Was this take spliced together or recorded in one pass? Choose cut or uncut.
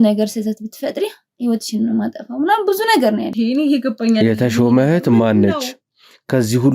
cut